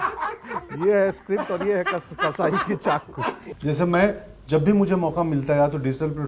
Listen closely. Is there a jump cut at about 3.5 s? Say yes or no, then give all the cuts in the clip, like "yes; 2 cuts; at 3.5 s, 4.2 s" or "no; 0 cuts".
yes; 1 cut; at 3.5 s